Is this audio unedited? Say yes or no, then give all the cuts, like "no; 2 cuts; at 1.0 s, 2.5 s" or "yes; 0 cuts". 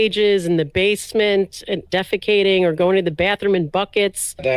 yes; 0 cuts